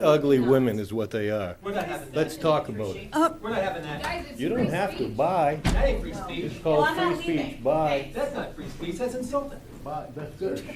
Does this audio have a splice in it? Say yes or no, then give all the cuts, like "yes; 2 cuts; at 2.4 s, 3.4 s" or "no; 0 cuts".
no; 0 cuts